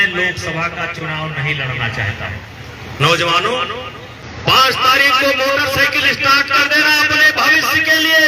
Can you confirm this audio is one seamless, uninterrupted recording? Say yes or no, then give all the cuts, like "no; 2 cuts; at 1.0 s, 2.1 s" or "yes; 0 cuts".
no; 1 cut; at 2.5 s